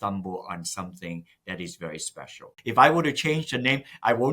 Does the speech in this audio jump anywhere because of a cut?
yes; 1 cut; at 2.6 s

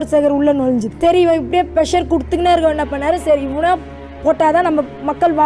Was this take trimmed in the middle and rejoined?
yes; 1 cut; at 0.9 s

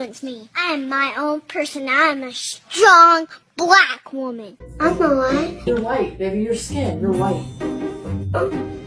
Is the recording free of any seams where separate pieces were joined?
yes; 0 cuts

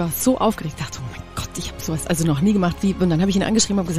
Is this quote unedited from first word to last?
yes; 0 cuts

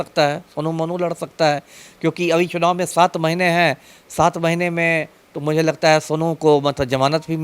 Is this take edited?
no; 0 cuts

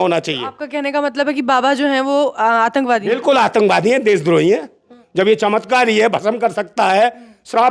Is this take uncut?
no; 1 cut; at 5.0 s

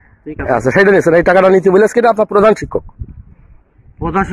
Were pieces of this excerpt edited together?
no; 0 cuts

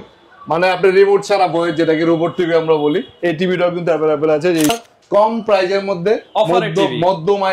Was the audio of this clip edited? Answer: yes; 1 cut; at 4.7 s

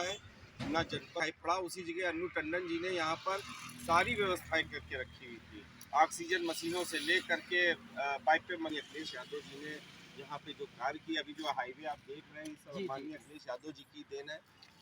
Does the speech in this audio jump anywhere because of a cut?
yes; 2 cuts; at 1.2 s, 8.7 s

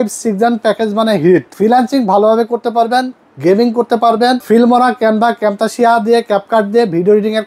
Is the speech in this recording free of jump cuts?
no; 2 cuts; at 1.5 s, 4.4 s

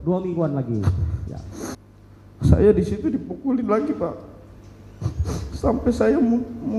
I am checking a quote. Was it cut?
yes; 1 cut; at 1.8 s

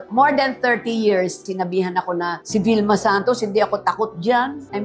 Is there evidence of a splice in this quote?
yes; 1 cut; at 1.4 s

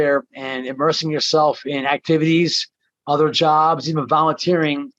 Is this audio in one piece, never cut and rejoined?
yes; 0 cuts

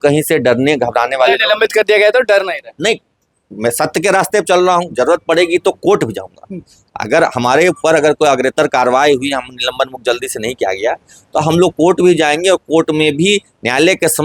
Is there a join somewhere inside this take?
no; 0 cuts

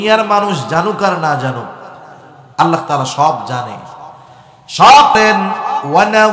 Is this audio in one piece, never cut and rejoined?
no; 1 cut; at 5.2 s

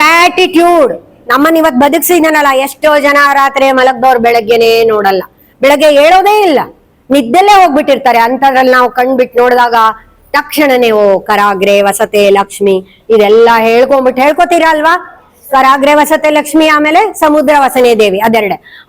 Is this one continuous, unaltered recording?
yes; 0 cuts

